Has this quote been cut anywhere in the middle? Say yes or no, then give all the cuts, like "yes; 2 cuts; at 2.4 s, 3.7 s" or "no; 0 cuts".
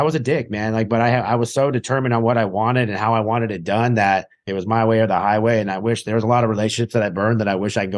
no; 0 cuts